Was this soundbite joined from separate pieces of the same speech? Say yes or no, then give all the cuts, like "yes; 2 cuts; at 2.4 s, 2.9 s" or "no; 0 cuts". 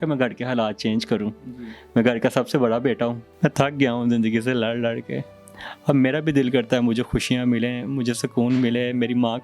yes; 1 cut; at 3.2 s